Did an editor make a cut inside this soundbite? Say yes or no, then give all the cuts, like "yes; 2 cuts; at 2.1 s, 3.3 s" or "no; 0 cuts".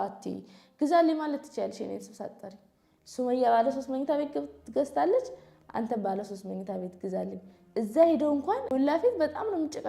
yes; 1 cut; at 8.7 s